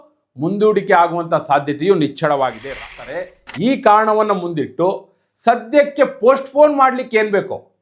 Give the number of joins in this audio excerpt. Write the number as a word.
one